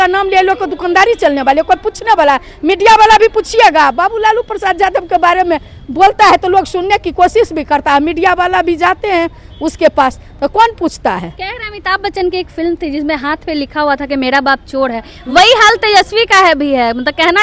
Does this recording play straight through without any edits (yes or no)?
yes